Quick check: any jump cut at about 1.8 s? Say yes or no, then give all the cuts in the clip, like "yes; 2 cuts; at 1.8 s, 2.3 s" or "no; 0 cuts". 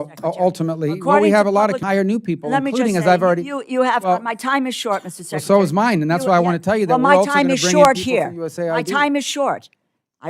yes; 1 cut; at 1.8 s